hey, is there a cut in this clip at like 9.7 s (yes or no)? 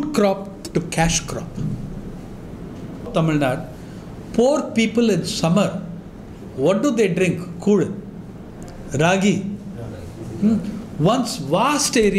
no